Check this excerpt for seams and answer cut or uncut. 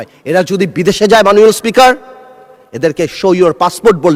uncut